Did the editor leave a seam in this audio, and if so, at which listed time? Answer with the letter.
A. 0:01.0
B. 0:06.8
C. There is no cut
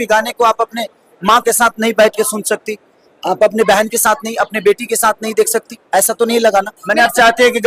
B